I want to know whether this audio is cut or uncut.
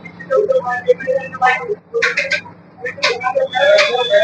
uncut